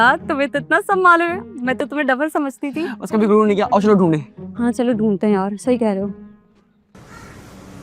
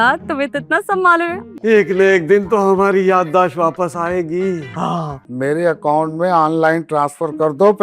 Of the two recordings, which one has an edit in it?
second; 2 cuts; at 1.5 s, 5.2 s

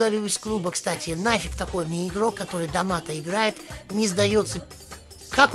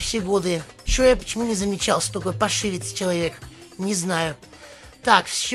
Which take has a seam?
first; 1 cut; at 4.6 s

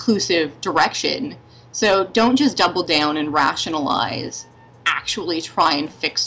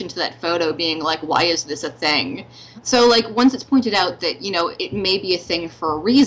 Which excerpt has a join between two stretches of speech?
second; 2 cuts; at 2.9 s, 4.8 s

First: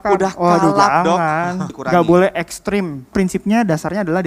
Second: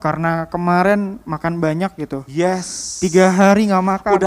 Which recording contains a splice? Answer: first; 2 cuts; at 1.8 s, 3.1 s

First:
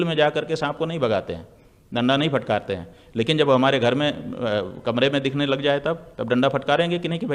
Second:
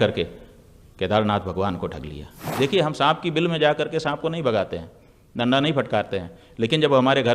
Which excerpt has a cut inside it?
second; 1 cut; at 2.5 s

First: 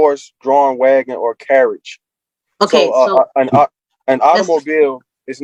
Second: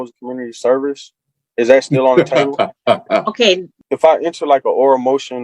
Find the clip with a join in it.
second; 1 cut; at 3.7 s

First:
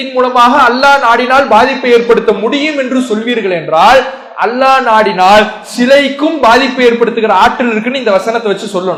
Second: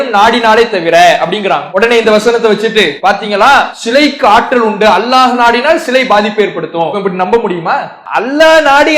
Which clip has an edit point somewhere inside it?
second; 5 cuts; at 1.7 s, 2.9 s, 3.8 s, 7.0 s, 8.0 s

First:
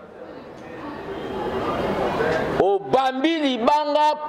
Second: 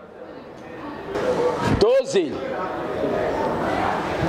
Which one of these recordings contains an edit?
second; 1 cut; at 1.2 s

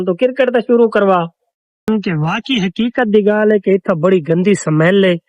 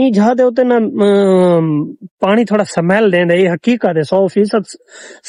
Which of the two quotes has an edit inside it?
first; 1 cut; at 1.9 s

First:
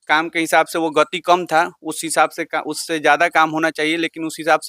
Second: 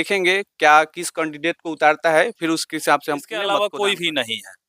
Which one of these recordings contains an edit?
second; 1 cut; at 3.3 s

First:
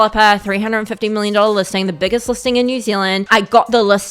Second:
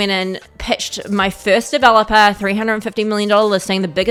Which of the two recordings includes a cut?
first; 1 cut; at 3.2 s

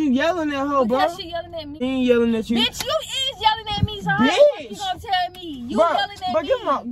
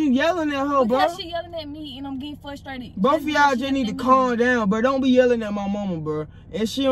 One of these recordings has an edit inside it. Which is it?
first; 1 cut; at 1.8 s

